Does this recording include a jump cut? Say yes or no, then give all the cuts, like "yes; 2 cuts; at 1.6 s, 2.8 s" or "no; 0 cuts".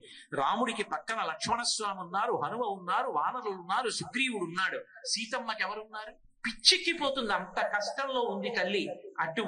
yes; 1 cut; at 6.2 s